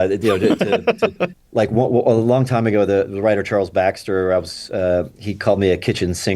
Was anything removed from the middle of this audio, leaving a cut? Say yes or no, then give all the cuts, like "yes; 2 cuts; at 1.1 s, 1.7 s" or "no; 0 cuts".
no; 0 cuts